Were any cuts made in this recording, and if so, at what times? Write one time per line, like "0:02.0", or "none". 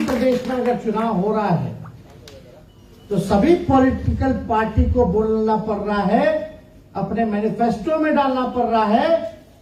none